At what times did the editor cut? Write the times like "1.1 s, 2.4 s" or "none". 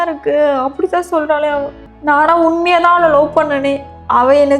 1.8 s